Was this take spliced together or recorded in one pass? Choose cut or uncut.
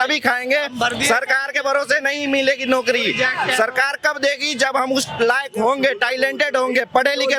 uncut